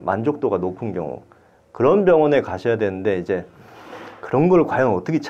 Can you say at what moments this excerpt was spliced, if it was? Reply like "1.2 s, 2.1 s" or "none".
none